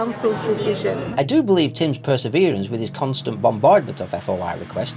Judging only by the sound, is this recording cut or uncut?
cut